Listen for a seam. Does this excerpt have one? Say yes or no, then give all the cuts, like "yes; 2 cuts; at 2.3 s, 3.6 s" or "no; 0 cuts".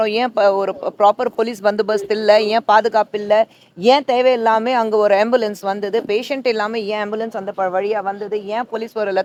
no; 0 cuts